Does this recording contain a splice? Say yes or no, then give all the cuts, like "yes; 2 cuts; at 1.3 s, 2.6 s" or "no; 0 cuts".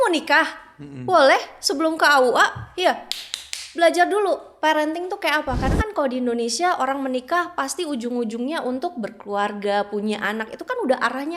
no; 0 cuts